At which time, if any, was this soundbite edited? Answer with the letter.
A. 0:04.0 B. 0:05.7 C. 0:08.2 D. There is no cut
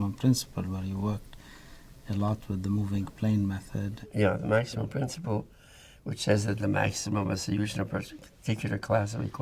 A